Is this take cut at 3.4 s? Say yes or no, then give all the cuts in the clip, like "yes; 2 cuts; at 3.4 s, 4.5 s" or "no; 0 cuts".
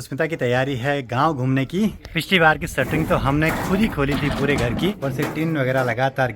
no; 2 cuts; at 2.0 s, 4.9 s